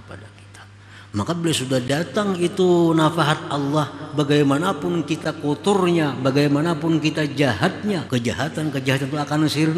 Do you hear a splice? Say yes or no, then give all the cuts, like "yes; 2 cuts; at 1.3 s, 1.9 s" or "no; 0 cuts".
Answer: yes; 1 cut; at 8.0 s